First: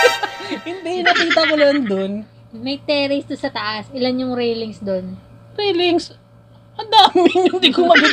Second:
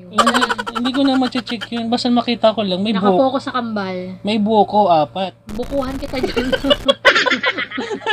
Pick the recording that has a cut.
first; 1 cut; at 2.5 s

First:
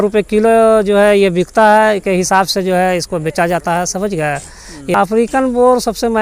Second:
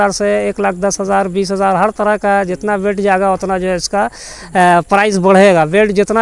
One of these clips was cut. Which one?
first; 1 cut; at 4.9 s

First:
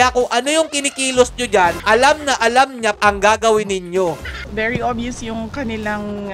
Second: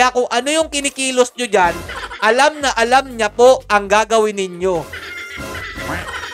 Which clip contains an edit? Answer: first; 3 cuts; at 1.8 s, 2.9 s, 4.4 s

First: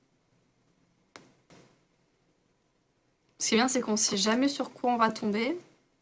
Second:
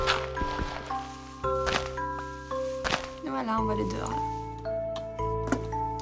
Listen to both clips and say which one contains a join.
first; 1 cut; at 3.6 s

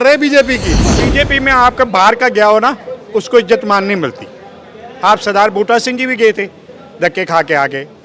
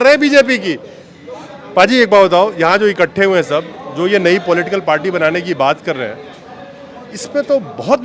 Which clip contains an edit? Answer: first; 1 cut; at 1.0 s

